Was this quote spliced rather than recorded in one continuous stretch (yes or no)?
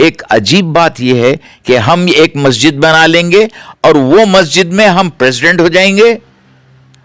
yes